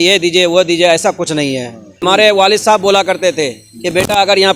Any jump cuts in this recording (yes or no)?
yes